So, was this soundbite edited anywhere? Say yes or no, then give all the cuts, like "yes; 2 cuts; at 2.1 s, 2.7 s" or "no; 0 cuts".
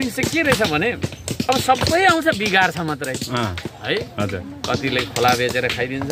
no; 0 cuts